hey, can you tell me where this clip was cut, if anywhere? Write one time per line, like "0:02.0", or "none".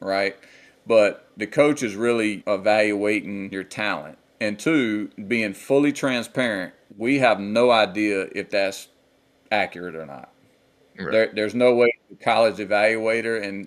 0:01.3
0:02.4
0:03.6